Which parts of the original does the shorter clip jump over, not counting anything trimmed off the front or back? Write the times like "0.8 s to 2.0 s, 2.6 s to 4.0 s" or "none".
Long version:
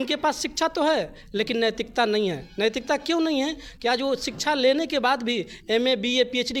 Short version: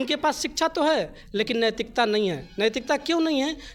none

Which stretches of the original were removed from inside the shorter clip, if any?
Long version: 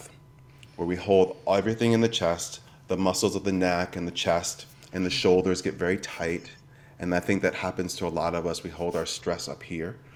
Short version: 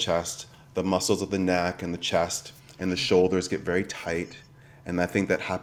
none

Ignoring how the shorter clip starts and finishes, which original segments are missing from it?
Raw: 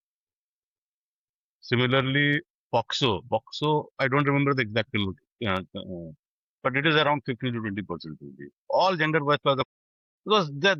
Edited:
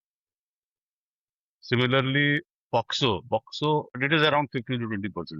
4.0 s to 6.7 s

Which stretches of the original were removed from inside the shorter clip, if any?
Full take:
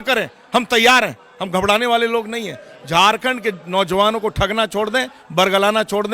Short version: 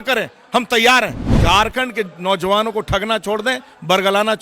1.2 s to 2.7 s

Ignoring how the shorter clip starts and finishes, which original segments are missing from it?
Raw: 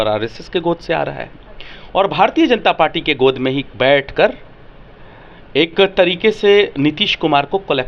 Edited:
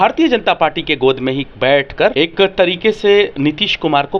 4.3 s to 5.5 s

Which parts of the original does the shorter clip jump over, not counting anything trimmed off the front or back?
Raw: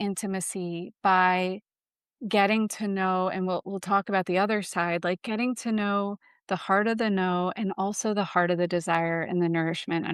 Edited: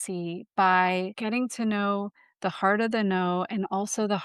1.6 s to 5.2 s

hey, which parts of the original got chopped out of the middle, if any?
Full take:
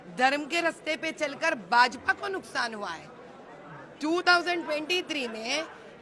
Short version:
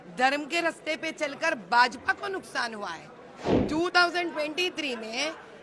3.5 s to 3.9 s

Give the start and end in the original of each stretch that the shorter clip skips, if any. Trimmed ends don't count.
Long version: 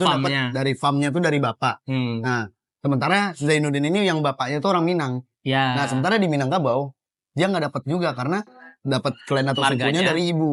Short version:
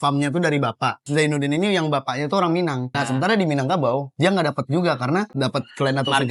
1.8 s to 3.3 s, 5.3 s to 5.8 s, 6.9 s to 7.3 s, 8.5 s to 8.8 s

